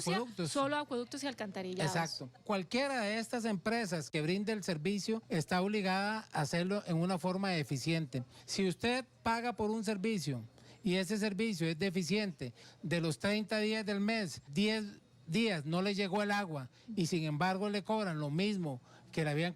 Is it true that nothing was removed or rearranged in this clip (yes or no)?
no